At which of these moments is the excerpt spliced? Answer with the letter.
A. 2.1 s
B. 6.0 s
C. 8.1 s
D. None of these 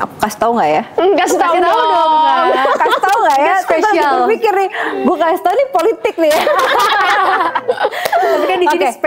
D